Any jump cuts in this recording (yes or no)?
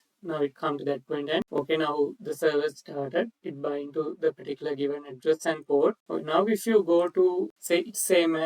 yes